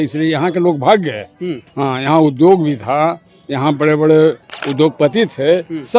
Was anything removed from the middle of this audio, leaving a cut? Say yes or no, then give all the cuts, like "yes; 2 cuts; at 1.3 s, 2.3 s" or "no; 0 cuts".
yes; 1 cut; at 4.6 s